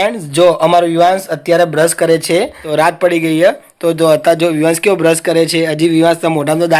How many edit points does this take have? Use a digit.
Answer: 1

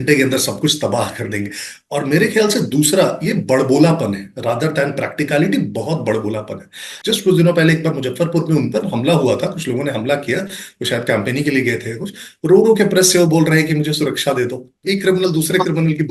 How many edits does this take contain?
2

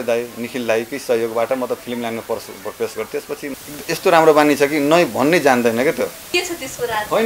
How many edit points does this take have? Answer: 2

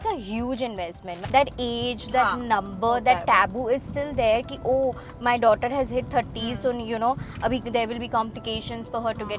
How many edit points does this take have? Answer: 1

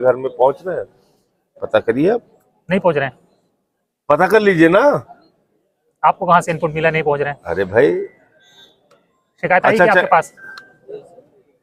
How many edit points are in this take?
0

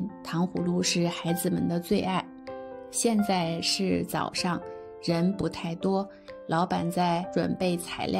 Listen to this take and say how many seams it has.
1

